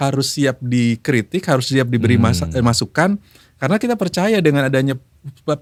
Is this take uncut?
yes; 0 cuts

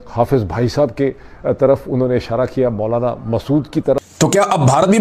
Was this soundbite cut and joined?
yes; 1 cut; at 4.0 s

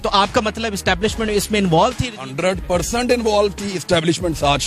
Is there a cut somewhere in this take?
no; 0 cuts

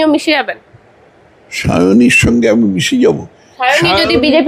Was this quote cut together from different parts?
no; 0 cuts

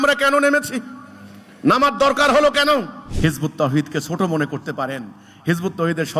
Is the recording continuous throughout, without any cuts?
no; 1 cut; at 3.0 s

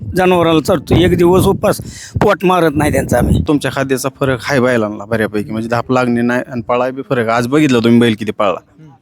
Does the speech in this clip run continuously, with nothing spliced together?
no; 1 cut; at 3.4 s

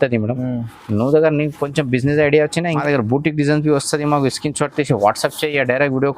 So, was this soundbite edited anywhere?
yes; 1 cut; at 2.8 s

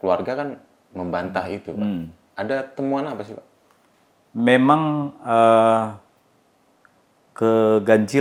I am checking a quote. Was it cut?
no; 0 cuts

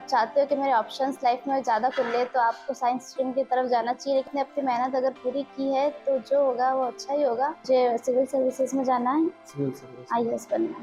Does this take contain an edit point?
yes; 2 cuts; at 4.2 s, 7.6 s

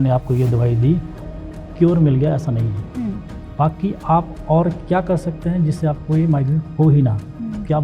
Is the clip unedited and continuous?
no; 2 cuts; at 1.2 s, 3.3 s

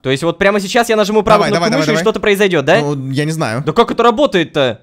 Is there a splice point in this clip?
yes; 1 cut; at 3.5 s

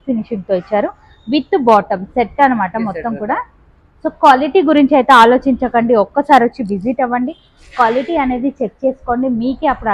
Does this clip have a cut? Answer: no; 0 cuts

